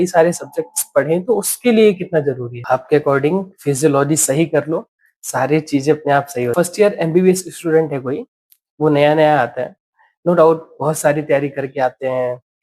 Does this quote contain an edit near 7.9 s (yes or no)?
no